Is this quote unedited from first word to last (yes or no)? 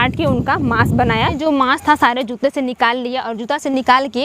no